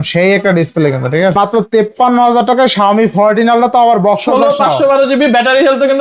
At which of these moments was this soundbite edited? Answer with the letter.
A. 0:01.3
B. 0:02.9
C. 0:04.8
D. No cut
A